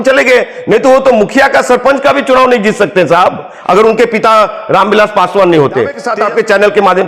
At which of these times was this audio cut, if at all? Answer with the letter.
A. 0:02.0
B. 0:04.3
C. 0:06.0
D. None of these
C